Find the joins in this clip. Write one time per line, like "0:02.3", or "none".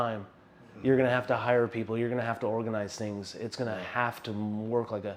none